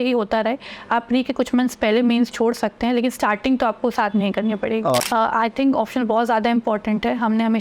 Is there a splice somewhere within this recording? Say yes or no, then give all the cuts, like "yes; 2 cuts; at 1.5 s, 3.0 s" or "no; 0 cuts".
yes; 1 cut; at 4.9 s